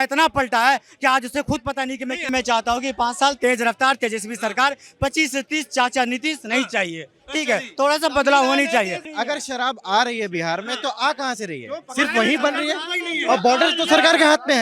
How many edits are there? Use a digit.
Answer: 2